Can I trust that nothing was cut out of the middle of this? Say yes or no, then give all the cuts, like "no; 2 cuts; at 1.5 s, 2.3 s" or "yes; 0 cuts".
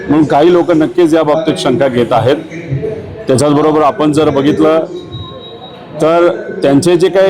yes; 0 cuts